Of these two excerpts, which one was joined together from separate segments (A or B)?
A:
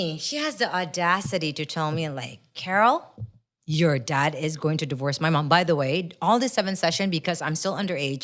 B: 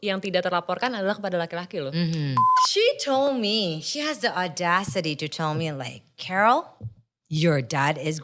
B